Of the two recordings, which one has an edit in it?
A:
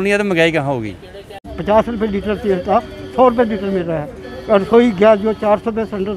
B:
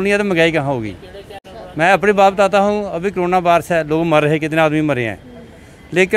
A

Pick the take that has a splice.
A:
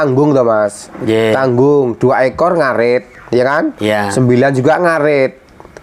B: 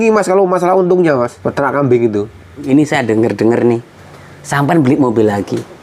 B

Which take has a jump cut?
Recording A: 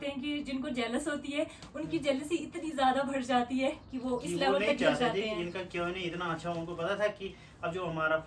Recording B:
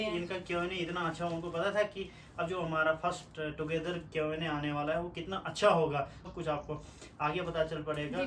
B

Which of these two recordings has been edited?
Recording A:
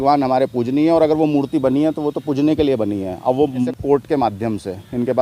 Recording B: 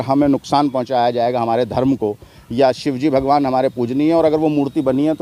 A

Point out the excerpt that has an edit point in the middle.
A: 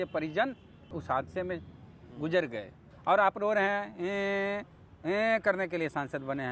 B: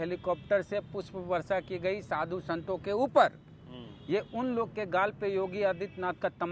A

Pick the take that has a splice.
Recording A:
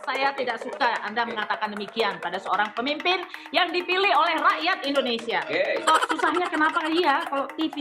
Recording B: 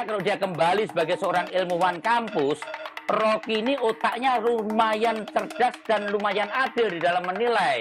A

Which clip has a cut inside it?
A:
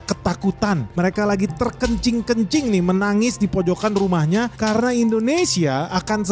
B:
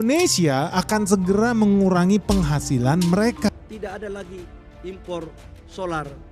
B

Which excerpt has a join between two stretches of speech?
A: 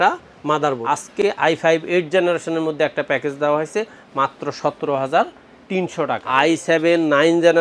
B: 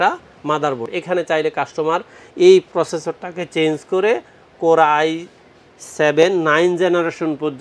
A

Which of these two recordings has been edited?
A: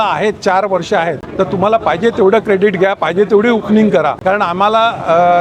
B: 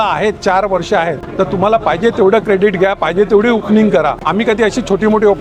B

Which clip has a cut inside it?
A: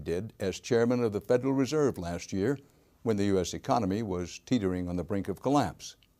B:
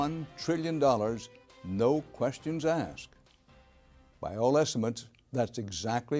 A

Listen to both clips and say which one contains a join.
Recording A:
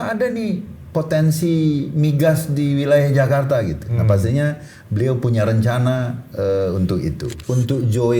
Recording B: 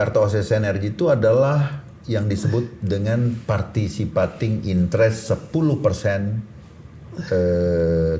A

